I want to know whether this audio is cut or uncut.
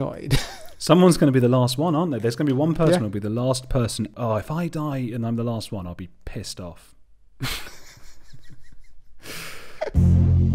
cut